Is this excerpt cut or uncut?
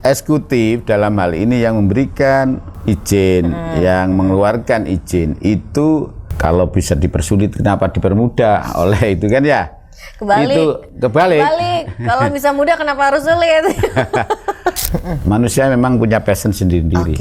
cut